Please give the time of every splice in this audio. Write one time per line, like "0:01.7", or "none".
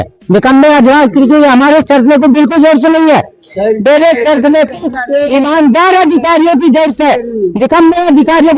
none